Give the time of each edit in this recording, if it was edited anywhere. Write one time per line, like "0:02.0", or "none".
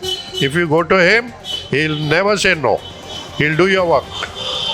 none